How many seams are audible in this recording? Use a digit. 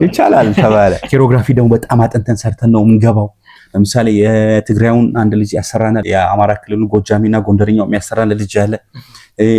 2